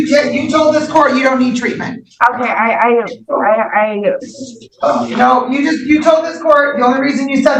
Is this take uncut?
yes; 0 cuts

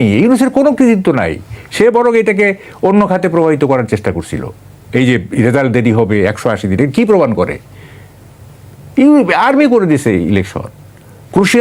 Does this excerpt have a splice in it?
no; 0 cuts

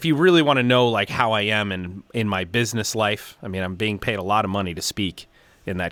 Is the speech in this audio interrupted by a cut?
no; 0 cuts

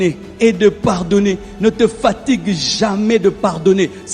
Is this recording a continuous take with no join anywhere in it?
yes; 0 cuts

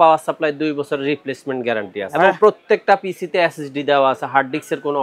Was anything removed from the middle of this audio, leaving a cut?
yes; 1 cut; at 2.1 s

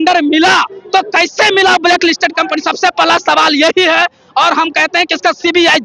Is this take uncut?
yes; 0 cuts

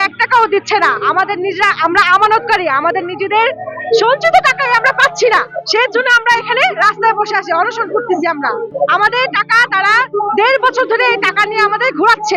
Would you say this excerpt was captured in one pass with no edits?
yes; 0 cuts

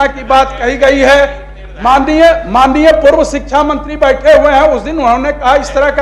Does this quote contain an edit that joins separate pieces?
no; 0 cuts

